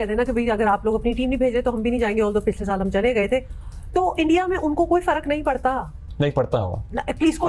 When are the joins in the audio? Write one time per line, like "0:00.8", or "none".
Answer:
none